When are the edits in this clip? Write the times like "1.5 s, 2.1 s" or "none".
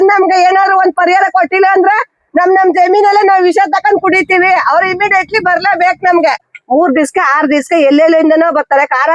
6.5 s